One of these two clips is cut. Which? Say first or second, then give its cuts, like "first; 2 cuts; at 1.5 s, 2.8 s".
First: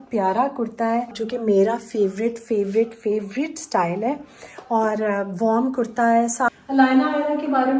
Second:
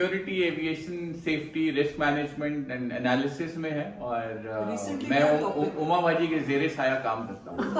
first; 2 cuts; at 1.2 s, 6.5 s